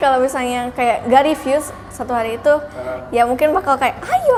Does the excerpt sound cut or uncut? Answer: uncut